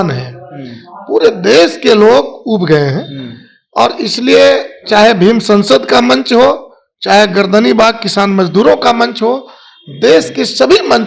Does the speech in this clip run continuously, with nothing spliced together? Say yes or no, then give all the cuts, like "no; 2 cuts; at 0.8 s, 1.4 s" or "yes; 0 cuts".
yes; 0 cuts